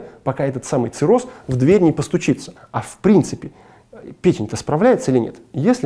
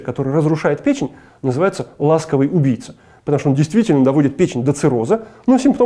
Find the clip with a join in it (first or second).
first